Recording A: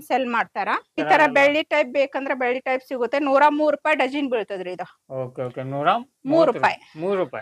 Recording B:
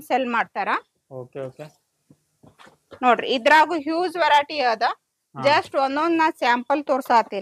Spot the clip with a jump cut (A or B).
A